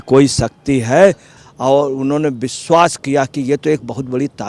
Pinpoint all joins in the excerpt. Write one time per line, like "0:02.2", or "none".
0:01.3

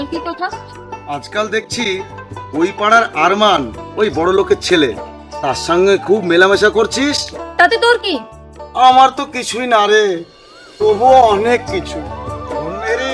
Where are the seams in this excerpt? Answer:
none

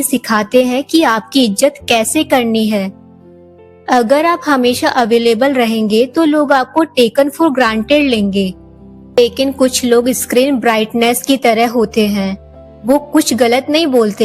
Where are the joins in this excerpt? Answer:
0:09.2

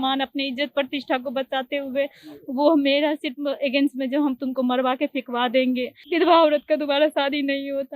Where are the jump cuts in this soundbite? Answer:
0:06.0

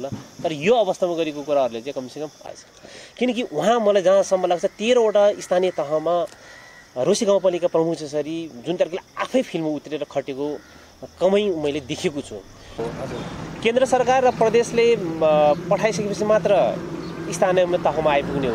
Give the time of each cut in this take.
0:02.4
0:12.9

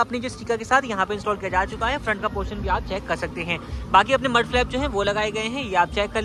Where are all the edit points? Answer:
none

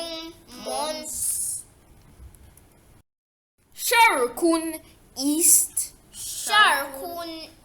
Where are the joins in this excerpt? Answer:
none

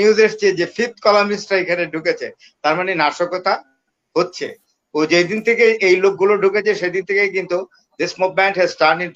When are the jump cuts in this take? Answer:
none

